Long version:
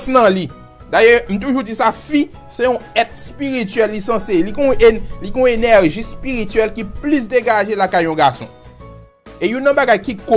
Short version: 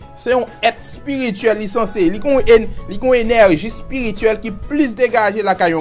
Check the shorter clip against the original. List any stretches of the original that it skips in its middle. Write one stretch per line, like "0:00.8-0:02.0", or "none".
none